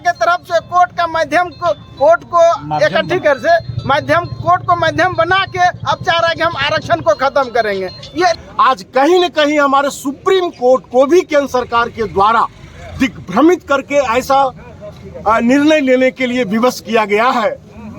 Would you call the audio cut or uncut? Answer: cut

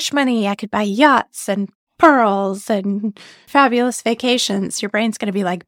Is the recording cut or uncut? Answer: cut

